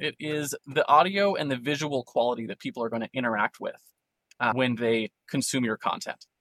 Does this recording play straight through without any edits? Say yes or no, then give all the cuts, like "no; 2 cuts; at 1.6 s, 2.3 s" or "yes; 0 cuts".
yes; 0 cuts